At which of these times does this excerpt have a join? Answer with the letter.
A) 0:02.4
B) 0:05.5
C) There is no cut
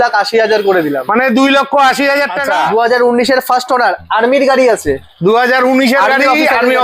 A